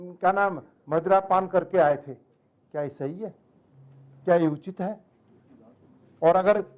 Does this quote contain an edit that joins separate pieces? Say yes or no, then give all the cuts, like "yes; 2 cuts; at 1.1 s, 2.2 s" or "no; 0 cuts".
no; 0 cuts